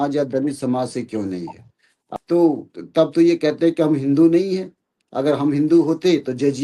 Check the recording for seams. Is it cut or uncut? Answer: cut